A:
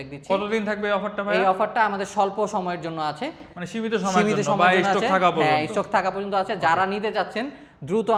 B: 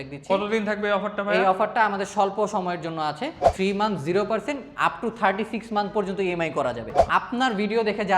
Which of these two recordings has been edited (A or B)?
B